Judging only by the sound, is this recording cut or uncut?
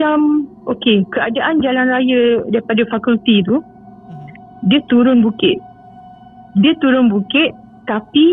uncut